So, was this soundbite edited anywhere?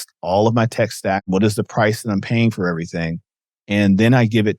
yes; 1 cut; at 1.3 s

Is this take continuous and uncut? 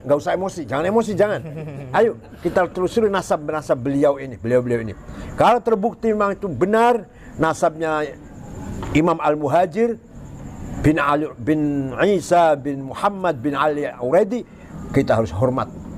yes; 0 cuts

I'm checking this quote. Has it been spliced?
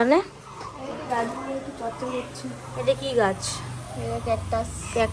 no; 0 cuts

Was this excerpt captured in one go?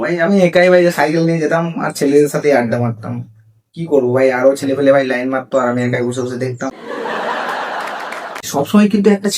no; 1 cut; at 8.5 s

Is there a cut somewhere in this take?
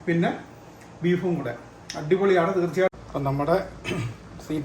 yes; 1 cut; at 2.9 s

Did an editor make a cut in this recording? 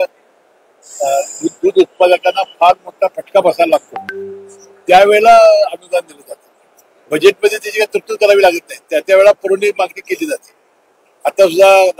no; 0 cuts

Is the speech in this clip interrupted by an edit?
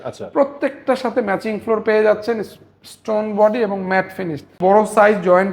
yes; 1 cut; at 4.5 s

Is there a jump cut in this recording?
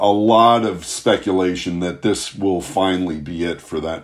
no; 0 cuts

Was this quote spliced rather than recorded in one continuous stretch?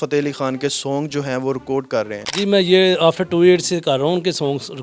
yes; 1 cut; at 2.2 s

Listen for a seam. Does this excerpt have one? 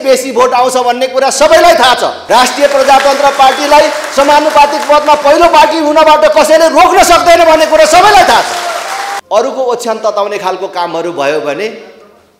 yes; 2 cuts; at 2.1 s, 9.1 s

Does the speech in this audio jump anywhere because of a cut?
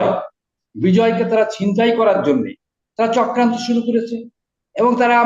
no; 0 cuts

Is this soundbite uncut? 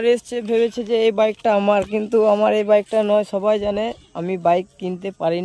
yes; 0 cuts

